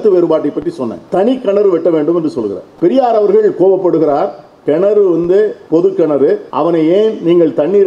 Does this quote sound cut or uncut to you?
cut